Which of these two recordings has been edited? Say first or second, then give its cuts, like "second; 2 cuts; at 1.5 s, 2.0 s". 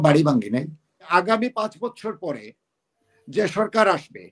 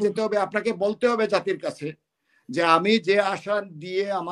first; 1 cut; at 1.1 s